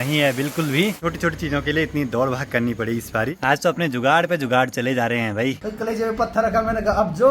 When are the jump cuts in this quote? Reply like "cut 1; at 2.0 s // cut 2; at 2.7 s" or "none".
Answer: cut 1; at 1.0 s // cut 2; at 3.3 s // cut 3; at 5.6 s